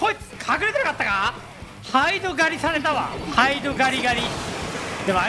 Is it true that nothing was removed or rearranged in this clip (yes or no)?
yes